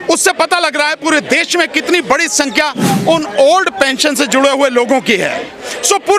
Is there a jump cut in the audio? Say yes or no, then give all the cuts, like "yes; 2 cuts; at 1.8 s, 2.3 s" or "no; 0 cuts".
no; 0 cuts